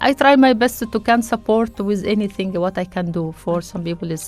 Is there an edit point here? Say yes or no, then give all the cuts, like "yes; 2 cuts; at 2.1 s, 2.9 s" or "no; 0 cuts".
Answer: no; 0 cuts